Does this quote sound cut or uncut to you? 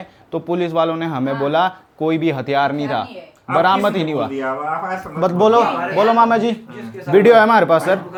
uncut